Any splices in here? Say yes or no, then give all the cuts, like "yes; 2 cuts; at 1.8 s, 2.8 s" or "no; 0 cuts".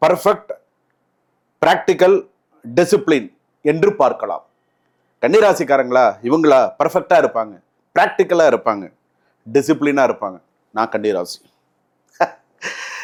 no; 0 cuts